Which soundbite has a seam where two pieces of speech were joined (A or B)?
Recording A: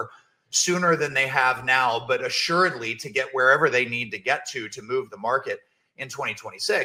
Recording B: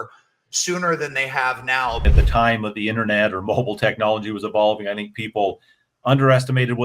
B